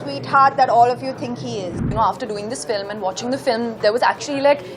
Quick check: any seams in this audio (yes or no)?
yes